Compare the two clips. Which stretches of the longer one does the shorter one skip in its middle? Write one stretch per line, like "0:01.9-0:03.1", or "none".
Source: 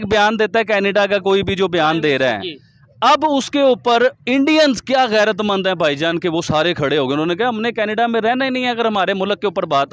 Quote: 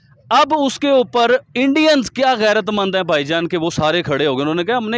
none